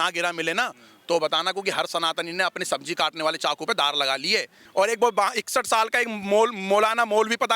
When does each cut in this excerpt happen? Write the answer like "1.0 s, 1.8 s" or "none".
4.6 s